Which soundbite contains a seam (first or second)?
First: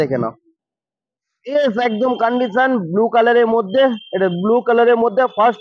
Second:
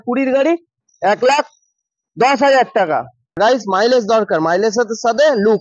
second